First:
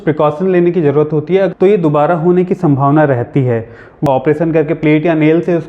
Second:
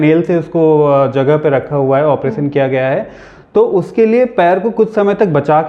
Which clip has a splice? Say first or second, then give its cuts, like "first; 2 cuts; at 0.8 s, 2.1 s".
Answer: first; 2 cuts; at 1.5 s, 4.1 s